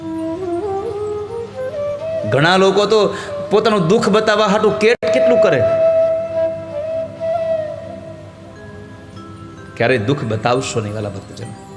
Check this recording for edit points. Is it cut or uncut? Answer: uncut